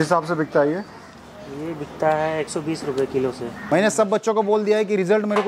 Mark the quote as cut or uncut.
cut